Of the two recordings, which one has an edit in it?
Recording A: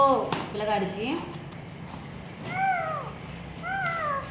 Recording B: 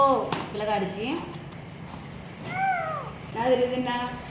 B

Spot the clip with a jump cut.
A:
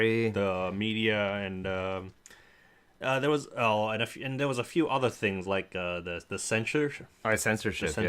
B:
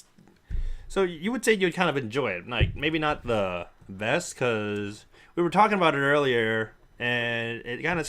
A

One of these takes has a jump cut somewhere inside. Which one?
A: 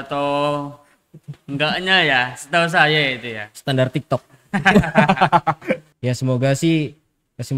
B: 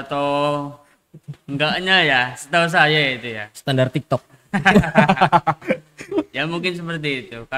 A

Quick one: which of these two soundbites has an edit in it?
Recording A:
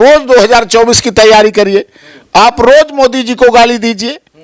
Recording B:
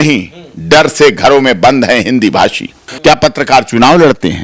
B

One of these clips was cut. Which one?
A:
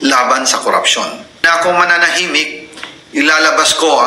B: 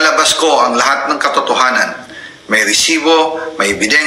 A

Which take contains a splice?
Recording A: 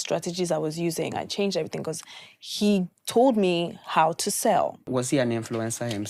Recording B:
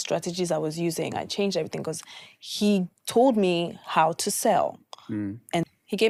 A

